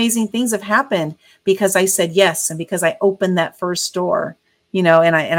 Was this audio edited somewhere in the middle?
no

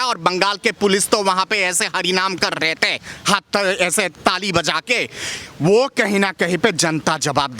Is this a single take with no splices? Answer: yes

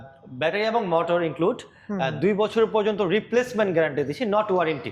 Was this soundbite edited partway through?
no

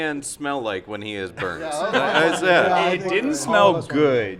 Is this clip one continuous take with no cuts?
yes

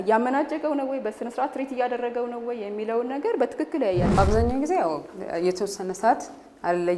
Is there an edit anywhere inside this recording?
yes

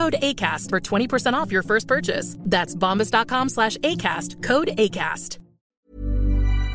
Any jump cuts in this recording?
yes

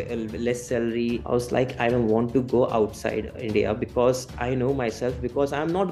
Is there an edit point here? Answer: yes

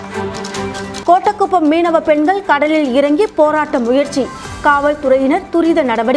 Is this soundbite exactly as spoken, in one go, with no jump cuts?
yes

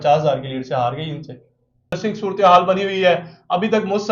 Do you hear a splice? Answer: yes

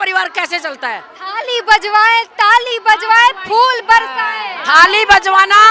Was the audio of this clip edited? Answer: no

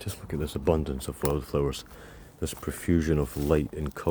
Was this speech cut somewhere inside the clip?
no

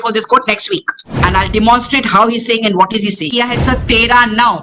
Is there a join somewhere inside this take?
yes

